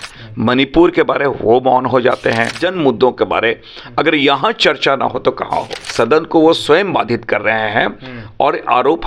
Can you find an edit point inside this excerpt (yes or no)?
yes